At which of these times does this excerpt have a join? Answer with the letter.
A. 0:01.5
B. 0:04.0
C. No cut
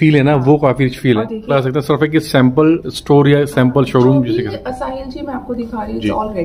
A